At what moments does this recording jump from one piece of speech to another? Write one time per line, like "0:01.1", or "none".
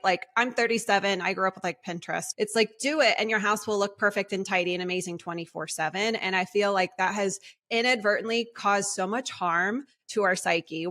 0:02.3